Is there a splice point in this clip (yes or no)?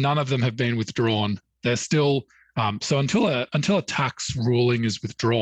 no